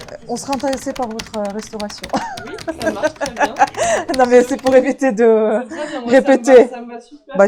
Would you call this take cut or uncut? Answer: uncut